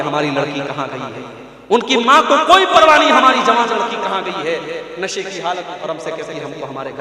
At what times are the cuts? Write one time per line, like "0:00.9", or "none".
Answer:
0:05.7